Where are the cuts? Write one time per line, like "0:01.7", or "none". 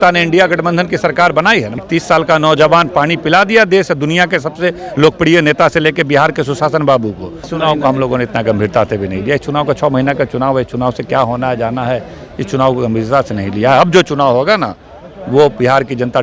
0:01.7
0:07.5

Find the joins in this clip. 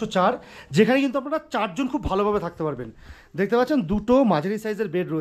none

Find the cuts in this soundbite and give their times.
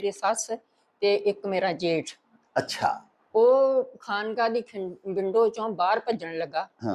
none

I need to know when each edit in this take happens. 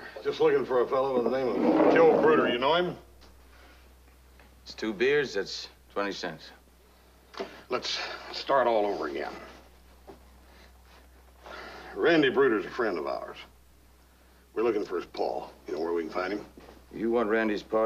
none

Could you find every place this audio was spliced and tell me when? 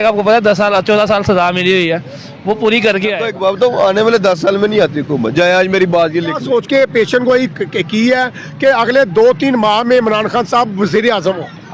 0:03.3
0:06.4

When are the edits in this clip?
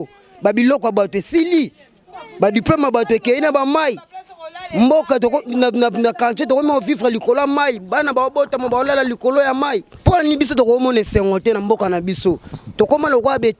0:09.9

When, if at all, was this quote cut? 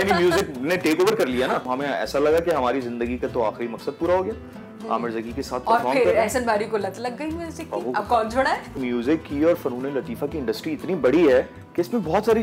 0:01.7
0:08.8

